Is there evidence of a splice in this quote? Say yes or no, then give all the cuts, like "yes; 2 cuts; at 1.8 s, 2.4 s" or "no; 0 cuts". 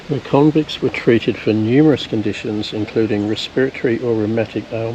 no; 0 cuts